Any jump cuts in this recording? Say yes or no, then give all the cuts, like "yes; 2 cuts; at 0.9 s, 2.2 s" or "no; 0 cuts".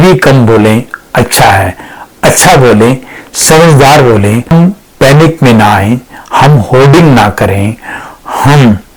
no; 0 cuts